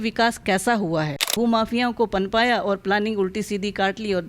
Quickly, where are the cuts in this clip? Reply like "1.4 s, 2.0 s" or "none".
1.3 s